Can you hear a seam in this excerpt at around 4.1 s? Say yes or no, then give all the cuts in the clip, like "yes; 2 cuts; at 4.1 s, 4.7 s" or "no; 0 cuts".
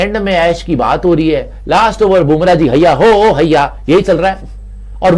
no; 0 cuts